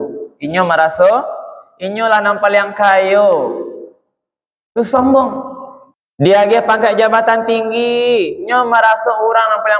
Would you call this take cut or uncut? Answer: cut